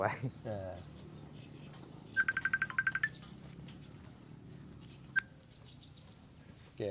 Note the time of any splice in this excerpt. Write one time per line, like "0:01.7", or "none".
none